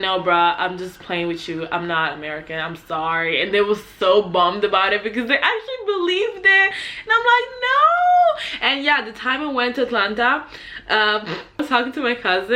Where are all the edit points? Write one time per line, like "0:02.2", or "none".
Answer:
0:11.6